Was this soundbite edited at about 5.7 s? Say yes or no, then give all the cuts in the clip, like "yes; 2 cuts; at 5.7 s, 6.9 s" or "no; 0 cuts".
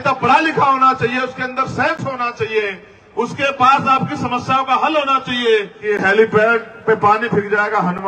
yes; 1 cut; at 5.7 s